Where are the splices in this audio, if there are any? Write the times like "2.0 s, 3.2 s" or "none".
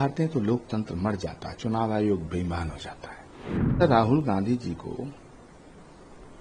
3.8 s